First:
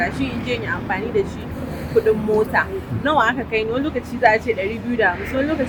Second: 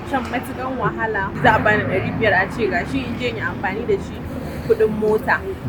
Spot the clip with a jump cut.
second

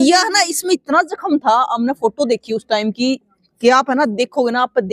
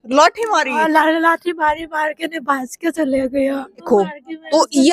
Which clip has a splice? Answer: second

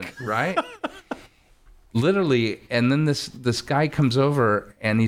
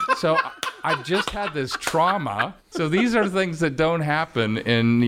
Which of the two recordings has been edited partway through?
second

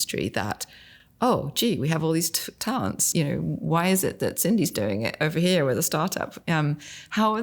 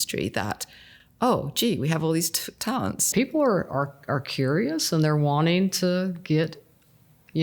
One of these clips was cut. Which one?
second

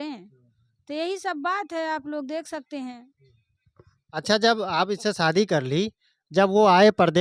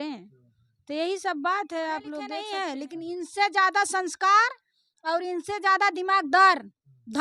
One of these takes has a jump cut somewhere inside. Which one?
second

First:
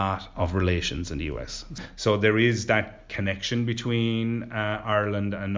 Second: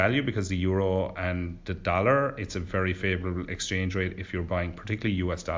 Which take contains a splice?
first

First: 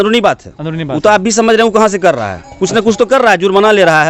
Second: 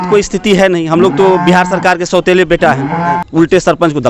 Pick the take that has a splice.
second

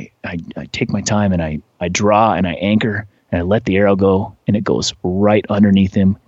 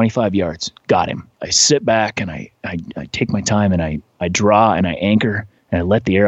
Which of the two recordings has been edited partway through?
second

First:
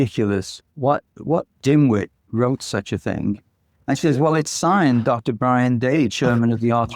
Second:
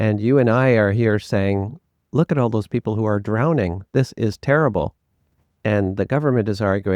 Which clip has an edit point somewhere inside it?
first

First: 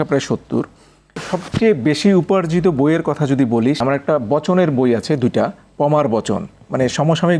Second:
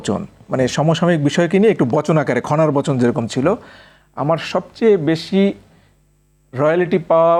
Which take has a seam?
first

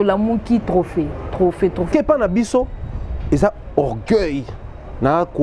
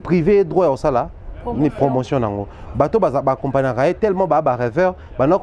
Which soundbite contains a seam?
first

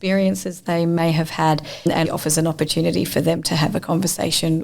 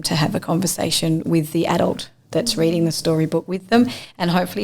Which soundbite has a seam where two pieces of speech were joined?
first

